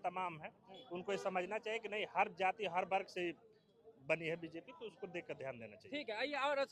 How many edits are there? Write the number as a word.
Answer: zero